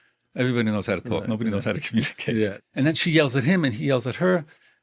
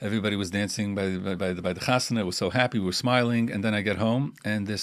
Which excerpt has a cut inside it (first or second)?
first